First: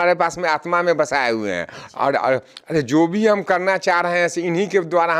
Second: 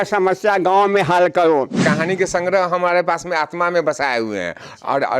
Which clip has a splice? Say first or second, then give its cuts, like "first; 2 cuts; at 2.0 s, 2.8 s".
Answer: second; 1 cut; at 1.8 s